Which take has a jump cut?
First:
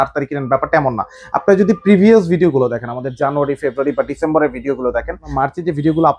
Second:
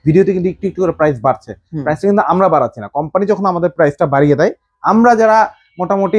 first; 1 cut; at 5.3 s

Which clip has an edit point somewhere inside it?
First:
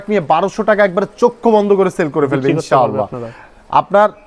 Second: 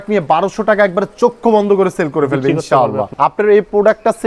second; 1 cut; at 3.1 s

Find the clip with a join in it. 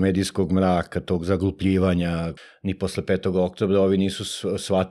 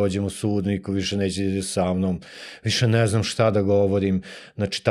first; 1 cut; at 2.3 s

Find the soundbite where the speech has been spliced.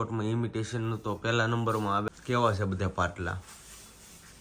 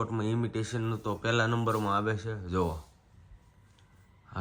first; 1 cut; at 2.1 s

